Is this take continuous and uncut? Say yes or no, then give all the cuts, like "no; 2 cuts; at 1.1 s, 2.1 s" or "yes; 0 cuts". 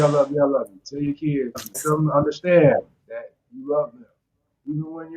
no; 1 cut; at 1.8 s